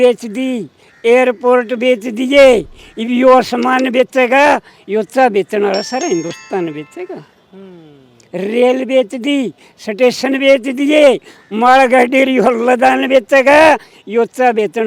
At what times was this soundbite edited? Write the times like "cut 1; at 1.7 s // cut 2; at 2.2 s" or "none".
none

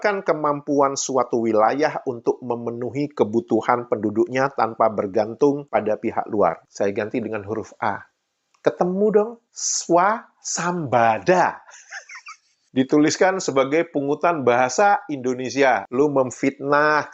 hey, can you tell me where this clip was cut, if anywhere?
cut 1; at 6.6 s

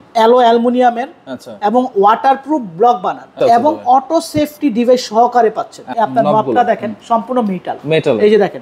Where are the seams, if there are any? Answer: cut 1; at 3.4 s // cut 2; at 5.9 s

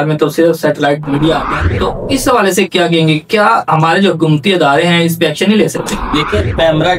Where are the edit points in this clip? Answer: cut 1; at 1.4 s

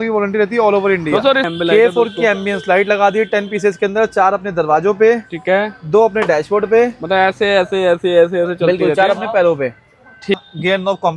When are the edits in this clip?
cut 1; at 1.5 s // cut 2; at 10.3 s

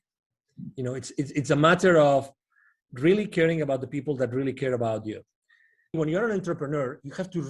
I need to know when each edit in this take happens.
cut 1; at 6.0 s

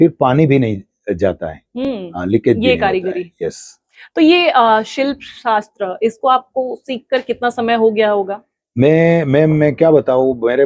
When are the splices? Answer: none

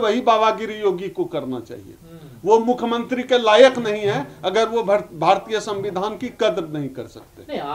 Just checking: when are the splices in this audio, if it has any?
none

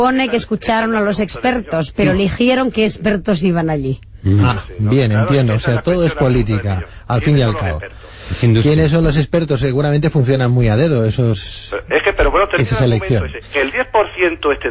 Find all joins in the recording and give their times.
cut 1; at 4.1 s

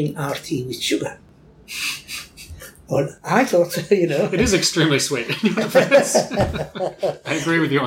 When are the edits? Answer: none

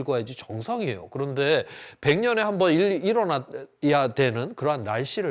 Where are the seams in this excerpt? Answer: none

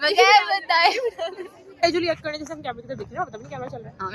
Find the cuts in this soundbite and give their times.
cut 1; at 1.8 s

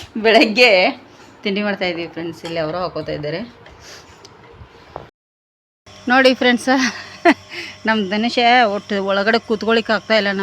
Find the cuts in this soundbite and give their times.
cut 1; at 5.1 s

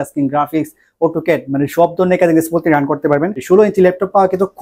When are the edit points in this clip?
cut 1; at 3.3 s

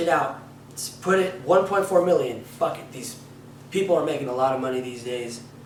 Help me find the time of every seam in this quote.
none

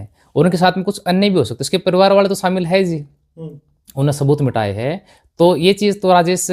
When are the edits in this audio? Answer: none

